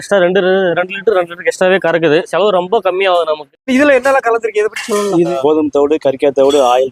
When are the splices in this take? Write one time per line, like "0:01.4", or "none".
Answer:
0:02.3
0:03.5
0:05.3